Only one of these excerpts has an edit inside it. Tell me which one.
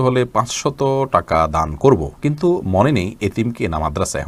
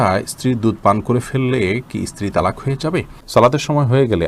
second; 1 cut; at 3.2 s

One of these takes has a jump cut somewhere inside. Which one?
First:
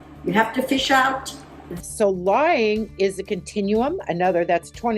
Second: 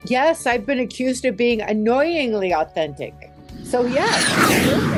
first; 1 cut; at 1.7 s

